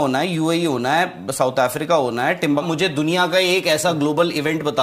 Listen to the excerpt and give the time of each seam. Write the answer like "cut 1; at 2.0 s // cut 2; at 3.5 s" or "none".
cut 1; at 2.7 s